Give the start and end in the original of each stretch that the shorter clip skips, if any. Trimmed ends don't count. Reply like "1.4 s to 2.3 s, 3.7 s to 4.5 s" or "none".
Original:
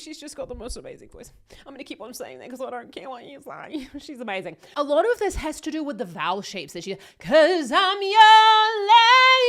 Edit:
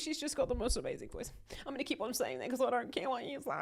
none

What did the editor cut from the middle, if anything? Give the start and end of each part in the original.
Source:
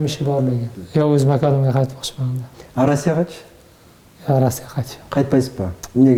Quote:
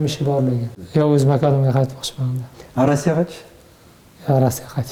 none

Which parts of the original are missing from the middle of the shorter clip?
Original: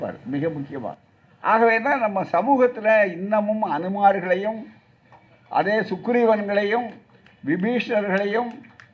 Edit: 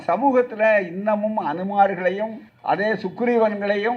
4.7 s to 5.3 s

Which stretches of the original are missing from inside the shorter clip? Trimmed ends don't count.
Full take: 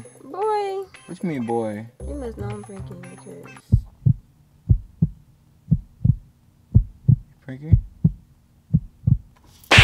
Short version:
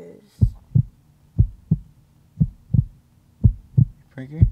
none

